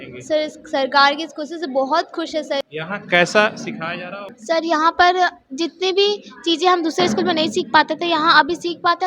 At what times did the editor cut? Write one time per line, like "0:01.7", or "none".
0:02.6
0:04.3